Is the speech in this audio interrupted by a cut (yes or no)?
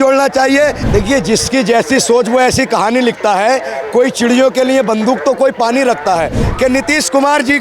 yes